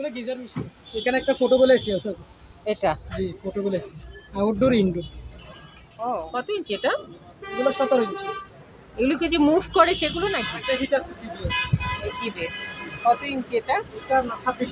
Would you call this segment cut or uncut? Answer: cut